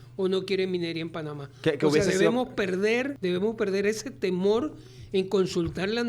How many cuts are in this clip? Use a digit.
1